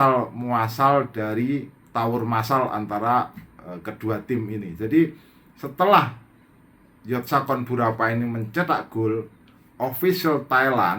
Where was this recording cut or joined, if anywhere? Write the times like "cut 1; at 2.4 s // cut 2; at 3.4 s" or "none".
cut 1; at 1.8 s